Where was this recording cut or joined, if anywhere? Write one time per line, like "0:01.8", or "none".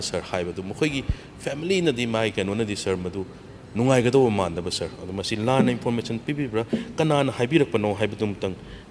none